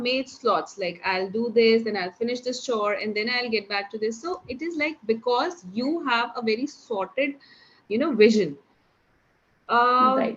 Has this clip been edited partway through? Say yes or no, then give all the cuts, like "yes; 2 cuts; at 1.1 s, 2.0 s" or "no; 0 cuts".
no; 0 cuts